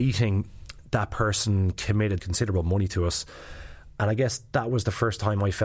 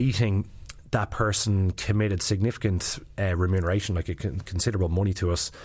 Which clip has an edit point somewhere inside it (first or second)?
first